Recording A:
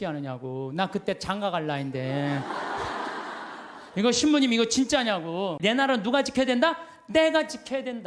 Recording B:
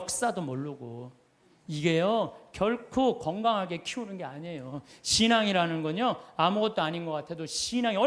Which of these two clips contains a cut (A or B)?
A